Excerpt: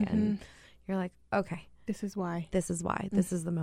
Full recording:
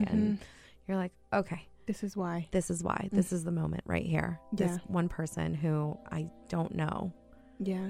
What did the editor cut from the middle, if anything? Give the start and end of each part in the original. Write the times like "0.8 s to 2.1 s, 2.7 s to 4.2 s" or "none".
none